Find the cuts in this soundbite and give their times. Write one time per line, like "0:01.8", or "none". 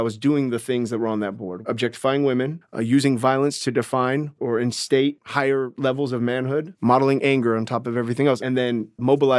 0:01.5
0:02.6
0:04.4
0:05.2
0:06.7
0:08.4

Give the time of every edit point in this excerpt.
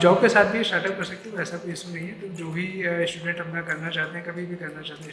none

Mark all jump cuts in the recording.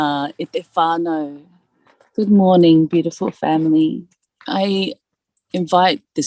0:04.3

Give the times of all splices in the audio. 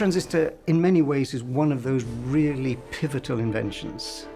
none

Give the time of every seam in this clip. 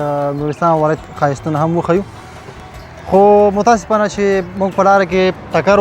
none

